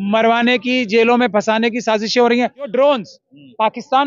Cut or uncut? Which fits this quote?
cut